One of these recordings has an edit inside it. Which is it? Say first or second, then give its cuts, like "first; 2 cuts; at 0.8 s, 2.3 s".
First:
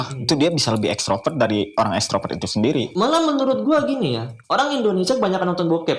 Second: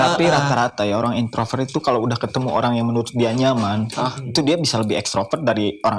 first; 2 cuts; at 2.9 s, 4.3 s